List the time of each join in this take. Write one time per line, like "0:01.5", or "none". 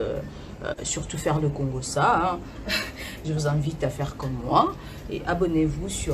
none